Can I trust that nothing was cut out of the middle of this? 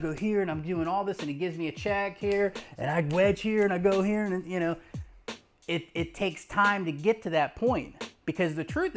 yes; 0 cuts

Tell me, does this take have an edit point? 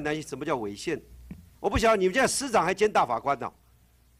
no; 0 cuts

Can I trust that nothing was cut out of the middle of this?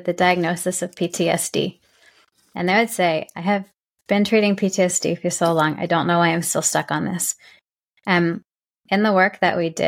yes; 0 cuts

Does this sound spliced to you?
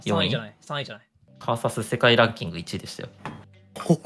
no; 0 cuts

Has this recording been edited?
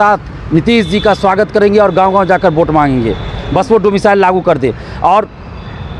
no; 0 cuts

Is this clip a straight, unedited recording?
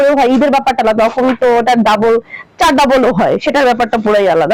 yes; 0 cuts

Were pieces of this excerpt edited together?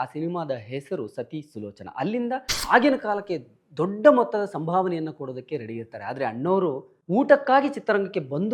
yes; 1 cut; at 2.5 s

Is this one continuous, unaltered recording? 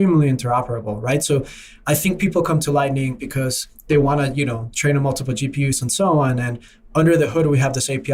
yes; 0 cuts

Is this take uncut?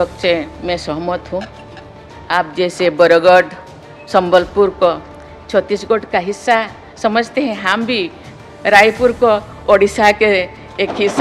yes; 0 cuts

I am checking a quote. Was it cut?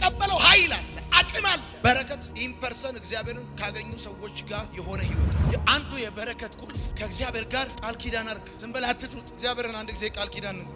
yes; 1 cut; at 5.5 s

